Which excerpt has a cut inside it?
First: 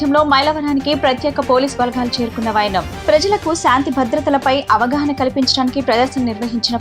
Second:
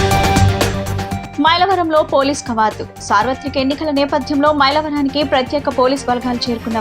second; 1 cut; at 1.2 s

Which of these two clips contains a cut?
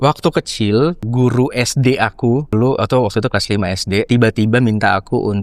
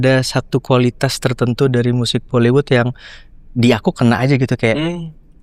first; 3 cuts; at 1.0 s, 2.5 s, 4.1 s

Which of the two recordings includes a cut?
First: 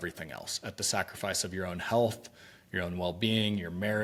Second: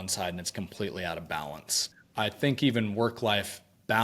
second; 1 cut; at 1.9 s

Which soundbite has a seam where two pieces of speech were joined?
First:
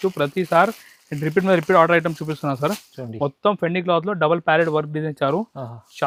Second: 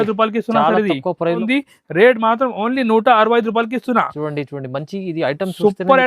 second; 1 cut; at 1.4 s

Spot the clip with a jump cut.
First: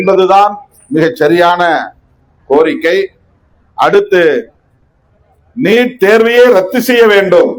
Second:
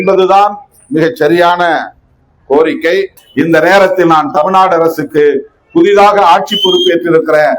second; 1 cut; at 3.2 s

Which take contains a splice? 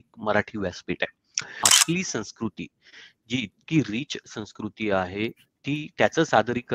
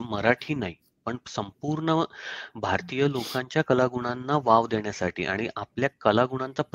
first; 1 cut; at 1.7 s

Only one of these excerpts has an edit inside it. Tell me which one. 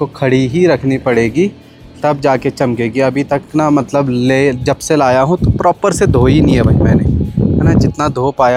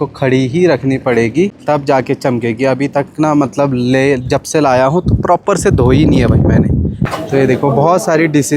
second; 2 cuts; at 1.6 s, 7.0 s

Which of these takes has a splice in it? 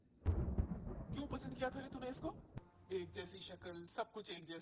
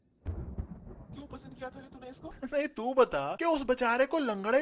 second; 1 cut; at 2.4 s

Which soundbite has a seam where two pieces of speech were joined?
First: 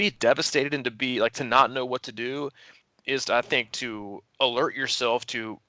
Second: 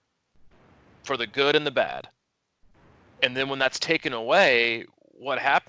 first; 1 cut; at 2.8 s

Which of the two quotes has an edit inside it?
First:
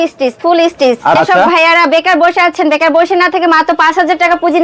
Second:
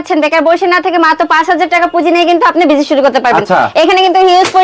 first; 1 cut; at 1.2 s

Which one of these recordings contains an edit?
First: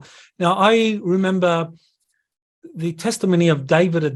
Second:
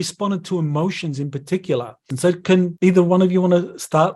second; 2 cuts; at 2.1 s, 2.7 s

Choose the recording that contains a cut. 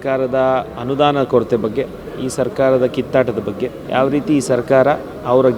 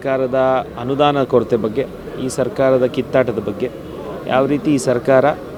first; 1 cut; at 3.8 s

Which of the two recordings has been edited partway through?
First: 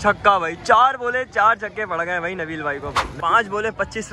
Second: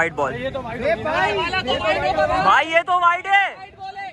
first; 1 cut; at 3.0 s

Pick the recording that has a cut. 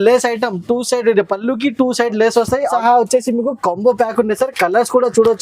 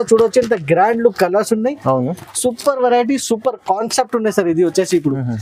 first; 1 cut; at 2.7 s

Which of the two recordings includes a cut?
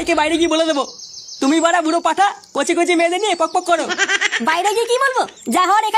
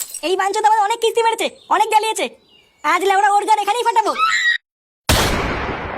second; 1 cut; at 4.9 s

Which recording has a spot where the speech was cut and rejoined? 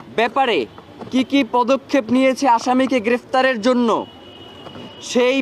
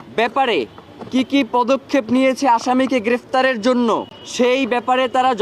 second; 1 cut; at 4.2 s

